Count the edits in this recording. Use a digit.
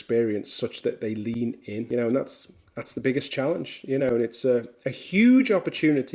1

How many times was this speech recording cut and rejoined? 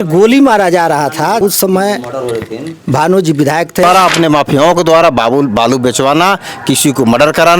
2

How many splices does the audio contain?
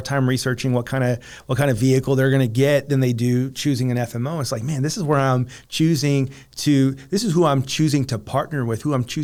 0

